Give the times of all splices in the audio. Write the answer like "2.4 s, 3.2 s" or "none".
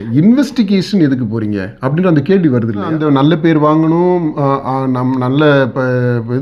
2.9 s